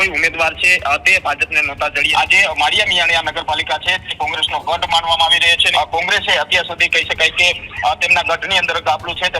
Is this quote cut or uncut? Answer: cut